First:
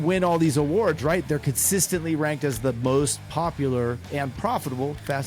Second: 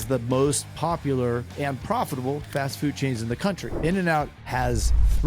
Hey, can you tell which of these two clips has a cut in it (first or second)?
second